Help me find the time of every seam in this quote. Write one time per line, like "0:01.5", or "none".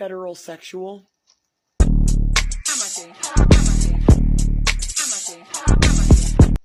none

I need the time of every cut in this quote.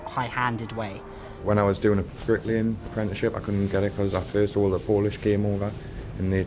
0:01.3
0:02.1

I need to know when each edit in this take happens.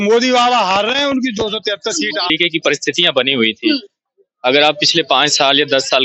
0:02.3

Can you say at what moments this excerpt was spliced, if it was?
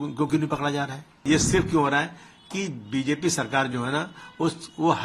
0:01.2

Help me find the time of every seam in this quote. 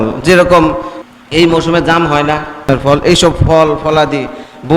0:00.9
0:02.7

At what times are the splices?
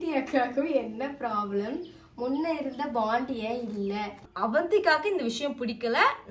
0:04.2

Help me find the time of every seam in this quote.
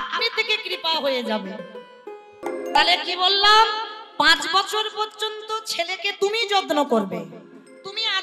0:02.4

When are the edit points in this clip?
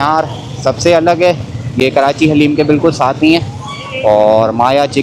none

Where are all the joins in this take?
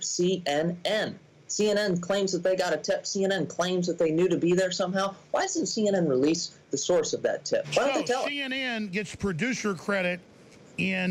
0:07.7

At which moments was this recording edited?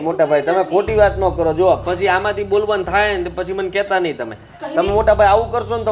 none

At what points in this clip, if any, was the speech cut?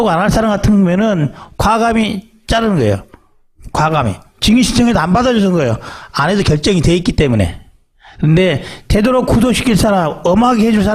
0:06.8

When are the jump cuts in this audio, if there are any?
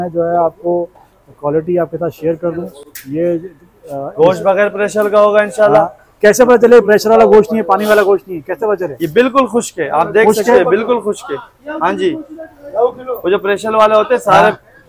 none

